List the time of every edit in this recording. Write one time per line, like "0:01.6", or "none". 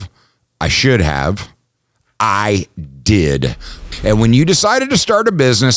0:03.8